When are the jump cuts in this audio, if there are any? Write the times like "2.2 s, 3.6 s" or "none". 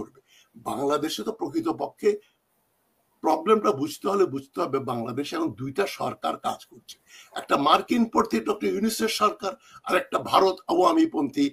none

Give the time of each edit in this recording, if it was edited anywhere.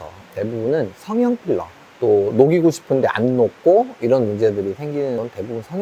1.9 s

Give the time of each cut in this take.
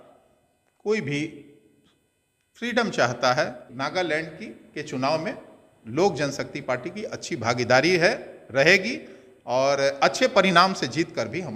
3.7 s

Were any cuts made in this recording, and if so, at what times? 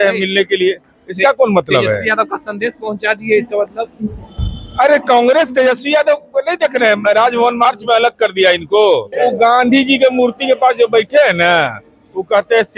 9.1 s

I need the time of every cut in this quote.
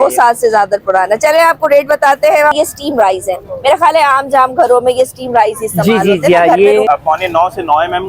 2.5 s, 6.9 s

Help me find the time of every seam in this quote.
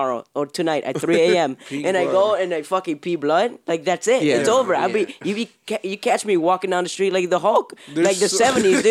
none

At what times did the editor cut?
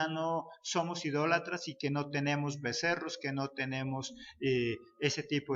2.9 s

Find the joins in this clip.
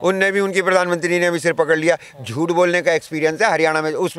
none

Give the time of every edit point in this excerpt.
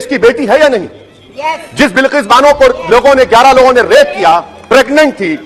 none

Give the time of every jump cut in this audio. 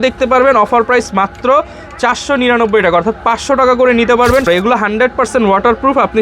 4.5 s

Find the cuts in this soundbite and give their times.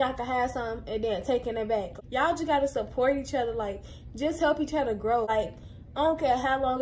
1.9 s, 5.3 s

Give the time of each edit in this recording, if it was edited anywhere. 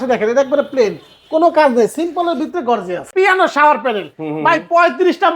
3.1 s

